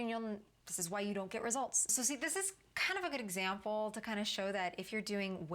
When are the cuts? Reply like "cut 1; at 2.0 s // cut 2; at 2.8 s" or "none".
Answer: cut 1; at 1.9 s